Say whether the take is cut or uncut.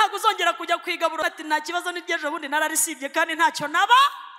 cut